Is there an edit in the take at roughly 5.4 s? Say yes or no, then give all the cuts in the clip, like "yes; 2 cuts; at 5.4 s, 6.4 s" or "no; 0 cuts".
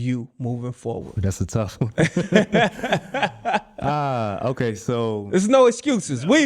no; 1 cut; at 1.1 s